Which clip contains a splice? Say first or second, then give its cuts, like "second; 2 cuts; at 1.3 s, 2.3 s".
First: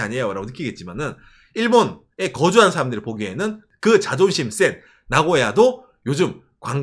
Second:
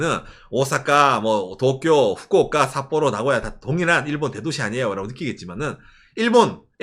first; 1 cut; at 3.6 s